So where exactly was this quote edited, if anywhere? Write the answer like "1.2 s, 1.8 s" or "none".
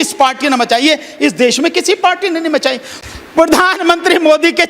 3.0 s